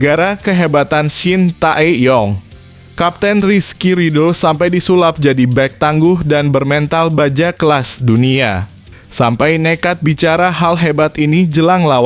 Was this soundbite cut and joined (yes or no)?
no